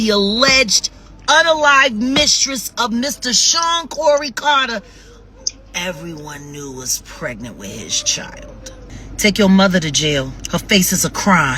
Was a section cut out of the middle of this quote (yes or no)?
yes